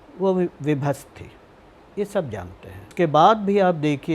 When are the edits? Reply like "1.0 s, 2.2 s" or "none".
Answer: 2.8 s